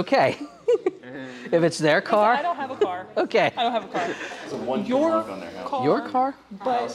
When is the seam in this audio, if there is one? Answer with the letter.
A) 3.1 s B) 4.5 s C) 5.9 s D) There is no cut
D